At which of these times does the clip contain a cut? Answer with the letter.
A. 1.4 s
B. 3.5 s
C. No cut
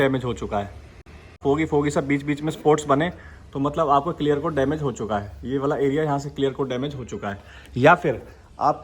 A